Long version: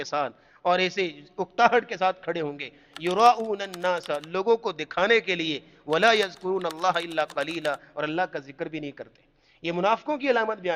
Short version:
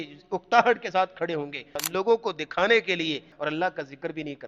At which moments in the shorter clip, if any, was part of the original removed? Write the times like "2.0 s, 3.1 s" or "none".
1.8 s, 3.3 s